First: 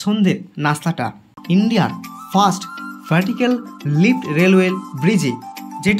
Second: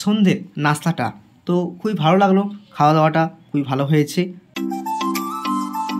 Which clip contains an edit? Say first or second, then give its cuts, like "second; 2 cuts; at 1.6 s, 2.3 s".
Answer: first; 1 cut; at 1.3 s